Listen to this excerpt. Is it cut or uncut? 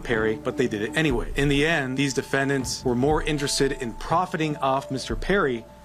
uncut